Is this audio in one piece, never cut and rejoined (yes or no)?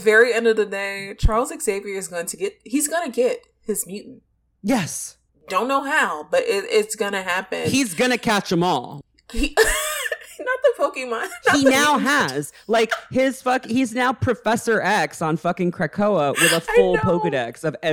yes